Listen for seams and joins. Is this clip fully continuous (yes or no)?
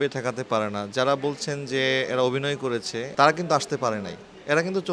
no